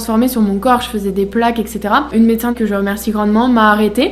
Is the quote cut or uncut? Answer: cut